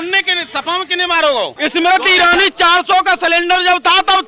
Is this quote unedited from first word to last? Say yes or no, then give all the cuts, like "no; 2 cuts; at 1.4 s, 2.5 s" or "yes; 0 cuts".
no; 1 cut; at 1.6 s